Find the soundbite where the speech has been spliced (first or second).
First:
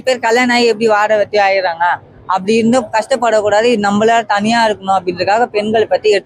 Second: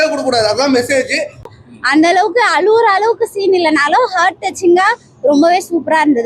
second